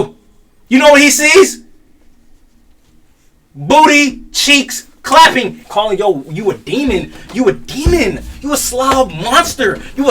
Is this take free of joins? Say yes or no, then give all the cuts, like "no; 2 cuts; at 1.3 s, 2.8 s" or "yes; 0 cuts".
no; 1 cut; at 5.6 s